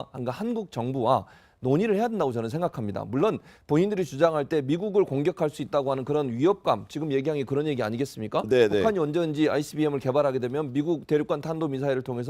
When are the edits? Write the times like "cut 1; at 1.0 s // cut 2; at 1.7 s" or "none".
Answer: cut 1; at 2.5 s

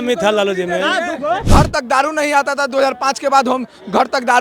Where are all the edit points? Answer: cut 1; at 1.4 s

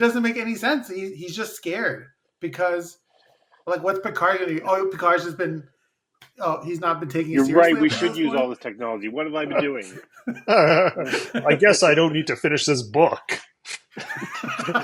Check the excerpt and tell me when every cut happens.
none

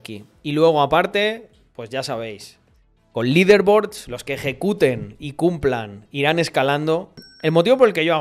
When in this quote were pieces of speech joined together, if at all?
cut 1; at 7.3 s

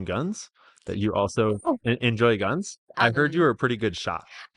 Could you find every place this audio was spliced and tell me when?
cut 1; at 2.9 s

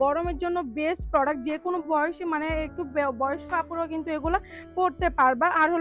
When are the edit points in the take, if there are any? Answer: none

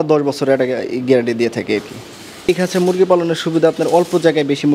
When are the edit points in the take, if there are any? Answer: cut 1; at 2.5 s

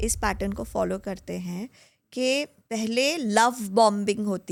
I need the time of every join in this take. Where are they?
none

